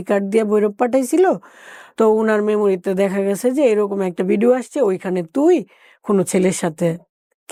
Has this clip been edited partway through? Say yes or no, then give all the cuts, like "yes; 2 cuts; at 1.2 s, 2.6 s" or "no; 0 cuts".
no; 0 cuts